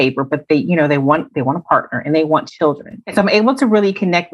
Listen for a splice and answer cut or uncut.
cut